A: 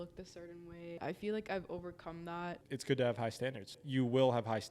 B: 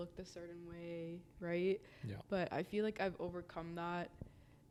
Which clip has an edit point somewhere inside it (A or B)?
A